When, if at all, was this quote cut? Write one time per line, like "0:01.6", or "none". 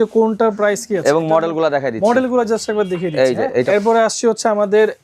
0:03.7